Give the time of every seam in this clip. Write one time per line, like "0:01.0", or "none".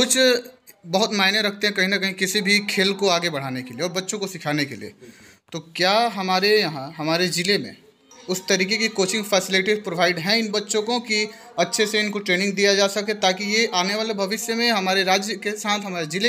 none